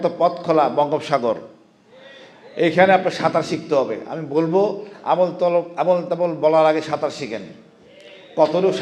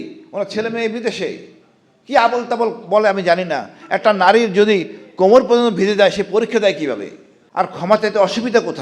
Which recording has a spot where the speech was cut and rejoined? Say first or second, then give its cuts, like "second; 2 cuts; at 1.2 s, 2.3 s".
second; 1 cut; at 7.9 s